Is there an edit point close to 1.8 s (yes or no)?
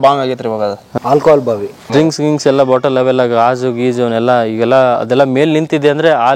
yes